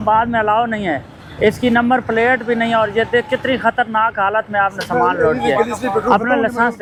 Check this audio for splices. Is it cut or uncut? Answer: uncut